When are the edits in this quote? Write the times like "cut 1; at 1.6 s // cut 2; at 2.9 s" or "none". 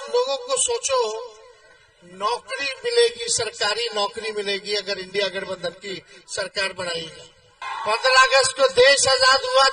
cut 1; at 7.6 s